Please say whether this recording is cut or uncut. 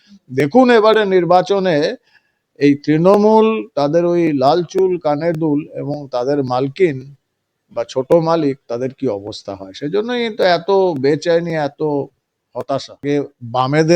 cut